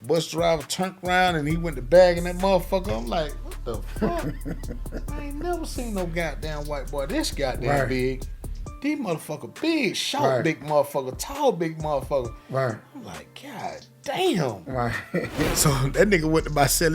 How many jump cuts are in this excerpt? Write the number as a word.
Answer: one